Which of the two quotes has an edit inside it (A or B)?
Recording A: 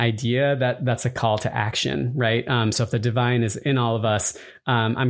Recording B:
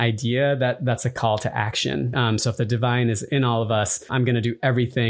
B